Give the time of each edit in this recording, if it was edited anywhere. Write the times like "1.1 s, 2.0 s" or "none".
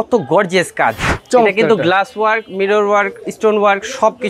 1.1 s